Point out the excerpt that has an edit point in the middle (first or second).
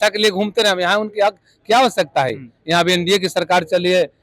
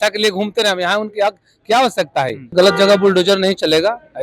second